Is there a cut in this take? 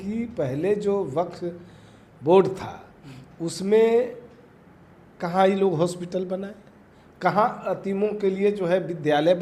no; 0 cuts

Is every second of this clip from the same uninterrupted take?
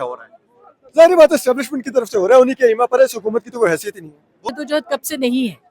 no; 1 cut; at 4.5 s

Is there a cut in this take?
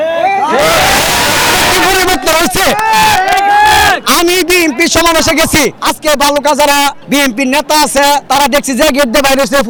no; 0 cuts

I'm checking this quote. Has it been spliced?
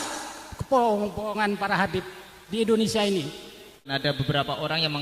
yes; 1 cut; at 3.6 s

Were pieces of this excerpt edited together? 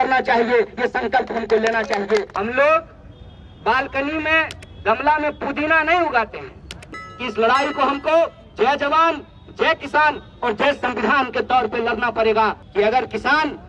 yes; 3 cuts; at 2.3 s, 7.1 s, 12.6 s

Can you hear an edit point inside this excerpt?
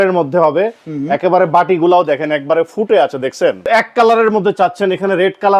yes; 1 cut; at 3.7 s

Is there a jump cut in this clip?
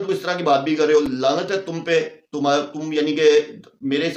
no; 0 cuts

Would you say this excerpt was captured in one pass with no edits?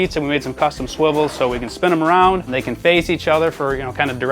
no; 1 cut; at 2.6 s

